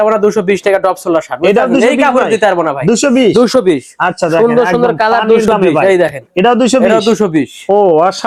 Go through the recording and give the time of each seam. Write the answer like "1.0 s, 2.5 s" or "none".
none